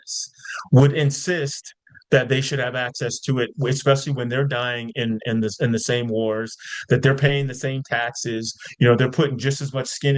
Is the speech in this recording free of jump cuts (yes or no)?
yes